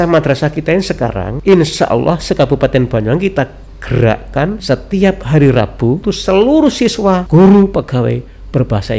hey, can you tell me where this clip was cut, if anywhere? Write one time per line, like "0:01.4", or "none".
0:01.3
0:04.6
0:06.0
0:07.2